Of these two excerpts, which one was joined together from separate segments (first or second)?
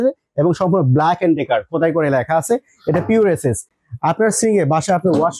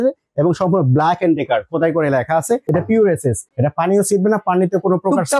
second